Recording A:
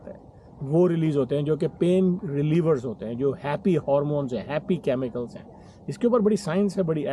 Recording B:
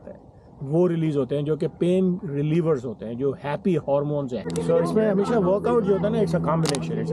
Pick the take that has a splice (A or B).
B